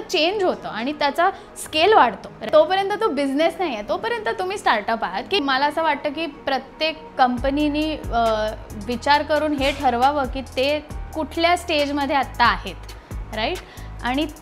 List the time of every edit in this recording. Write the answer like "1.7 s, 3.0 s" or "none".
2.5 s, 5.4 s